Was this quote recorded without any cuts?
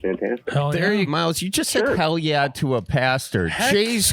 no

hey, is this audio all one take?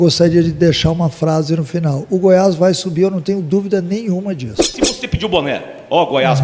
no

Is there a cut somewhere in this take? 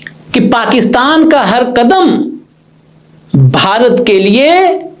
no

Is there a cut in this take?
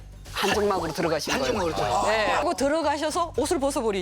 yes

